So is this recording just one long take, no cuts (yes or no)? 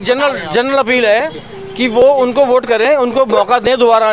yes